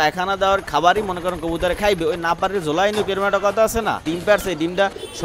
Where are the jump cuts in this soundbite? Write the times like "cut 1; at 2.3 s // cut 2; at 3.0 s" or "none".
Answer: cut 1; at 4.1 s

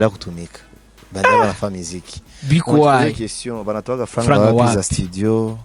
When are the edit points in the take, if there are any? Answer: none

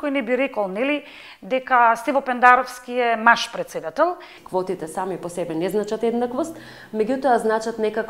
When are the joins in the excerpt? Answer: cut 1; at 4.3 s

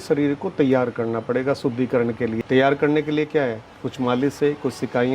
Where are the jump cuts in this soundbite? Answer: cut 1; at 2.4 s

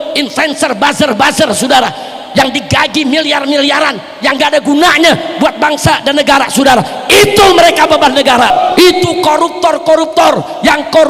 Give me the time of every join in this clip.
cut 1; at 8.5 s

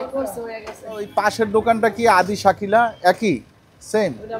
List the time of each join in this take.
cut 1; at 1.1 s

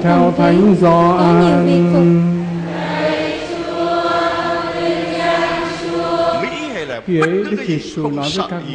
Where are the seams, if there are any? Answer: none

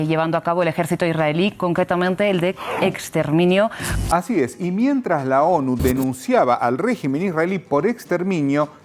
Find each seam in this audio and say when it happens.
none

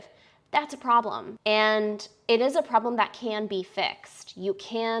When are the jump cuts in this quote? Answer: cut 1; at 1.3 s

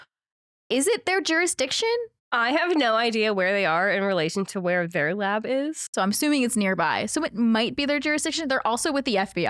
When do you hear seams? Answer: cut 1; at 2.2 s // cut 2; at 5.9 s

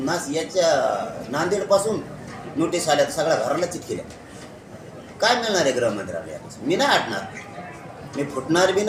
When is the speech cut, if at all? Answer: none

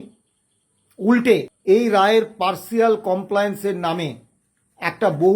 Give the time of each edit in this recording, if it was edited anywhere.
cut 1; at 1.5 s

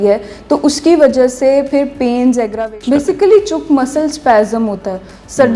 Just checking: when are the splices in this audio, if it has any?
cut 1; at 2.6 s

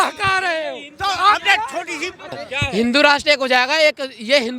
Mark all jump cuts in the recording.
cut 1; at 2.4 s

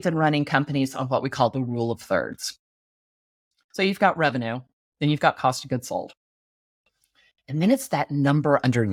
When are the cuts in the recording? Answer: none

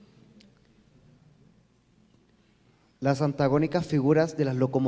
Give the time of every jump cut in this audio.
none

